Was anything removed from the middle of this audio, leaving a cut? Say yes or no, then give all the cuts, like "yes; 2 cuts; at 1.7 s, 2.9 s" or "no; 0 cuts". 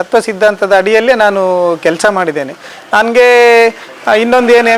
no; 0 cuts